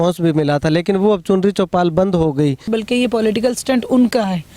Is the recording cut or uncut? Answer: cut